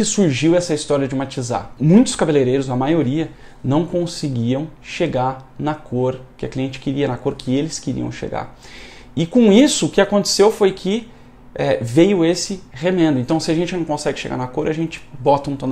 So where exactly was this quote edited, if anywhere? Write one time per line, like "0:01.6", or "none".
0:01.7